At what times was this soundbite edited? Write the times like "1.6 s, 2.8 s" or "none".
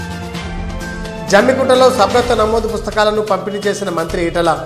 none